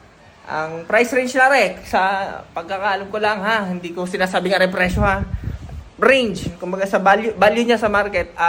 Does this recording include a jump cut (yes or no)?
no